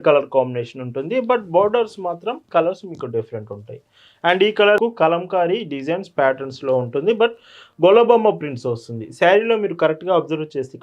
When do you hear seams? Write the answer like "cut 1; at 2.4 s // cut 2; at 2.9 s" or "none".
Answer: cut 1; at 4.8 s